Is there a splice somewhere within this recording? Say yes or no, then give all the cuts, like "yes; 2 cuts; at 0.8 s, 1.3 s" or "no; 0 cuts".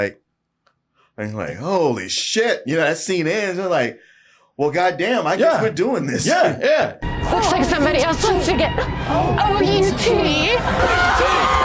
yes; 2 cuts; at 7.0 s, 10.8 s